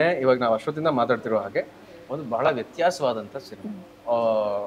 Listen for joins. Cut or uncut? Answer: uncut